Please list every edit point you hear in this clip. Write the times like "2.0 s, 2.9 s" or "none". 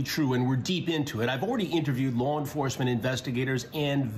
none